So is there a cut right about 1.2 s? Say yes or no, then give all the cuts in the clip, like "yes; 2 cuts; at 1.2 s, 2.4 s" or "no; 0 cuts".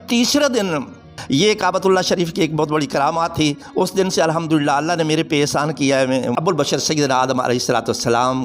yes; 2 cuts; at 1.2 s, 6.3 s